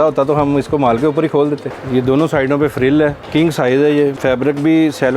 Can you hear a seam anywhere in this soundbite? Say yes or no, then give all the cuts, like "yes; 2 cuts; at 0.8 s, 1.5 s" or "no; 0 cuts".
yes; 3 cuts; at 1.7 s, 3.2 s, 4.2 s